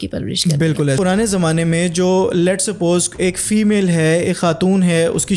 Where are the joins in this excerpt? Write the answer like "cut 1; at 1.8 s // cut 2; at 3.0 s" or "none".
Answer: cut 1; at 1.0 s